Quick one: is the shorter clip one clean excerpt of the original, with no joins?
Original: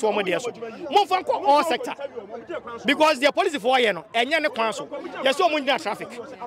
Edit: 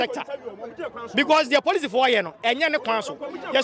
yes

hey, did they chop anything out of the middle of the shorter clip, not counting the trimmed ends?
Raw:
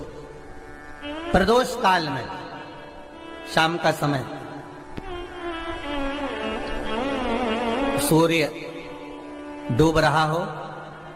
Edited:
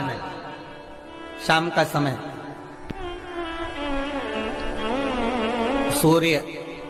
no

